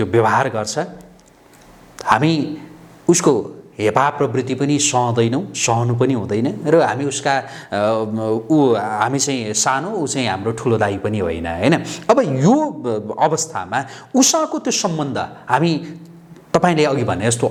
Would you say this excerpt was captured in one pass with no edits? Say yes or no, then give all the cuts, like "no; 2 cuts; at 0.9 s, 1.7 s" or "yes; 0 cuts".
yes; 0 cuts